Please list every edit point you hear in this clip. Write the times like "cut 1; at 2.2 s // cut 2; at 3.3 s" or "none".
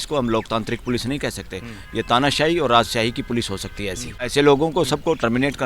cut 1; at 4.2 s